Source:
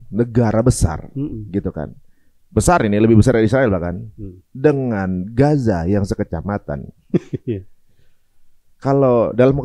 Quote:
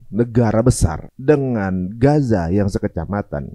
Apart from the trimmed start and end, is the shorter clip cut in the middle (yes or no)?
yes